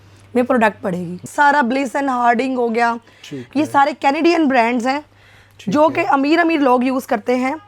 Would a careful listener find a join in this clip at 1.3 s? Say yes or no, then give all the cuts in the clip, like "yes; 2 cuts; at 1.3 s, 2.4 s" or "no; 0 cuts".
yes; 1 cut; at 1.3 s